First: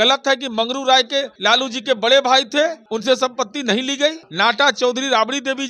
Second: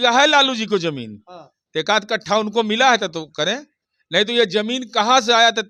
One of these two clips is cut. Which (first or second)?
first